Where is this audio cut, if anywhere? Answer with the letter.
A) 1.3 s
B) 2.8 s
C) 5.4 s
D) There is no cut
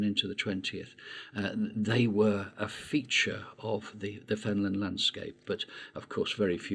D